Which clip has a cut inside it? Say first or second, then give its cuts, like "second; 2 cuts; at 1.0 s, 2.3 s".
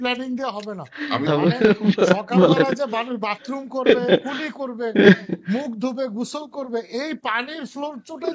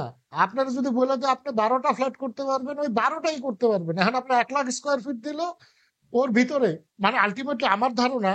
first; 1 cut; at 1.2 s